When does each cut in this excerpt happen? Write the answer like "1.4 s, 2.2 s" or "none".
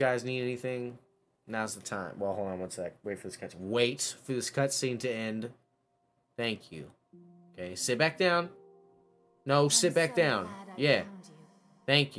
none